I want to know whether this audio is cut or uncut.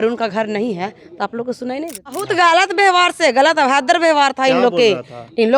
cut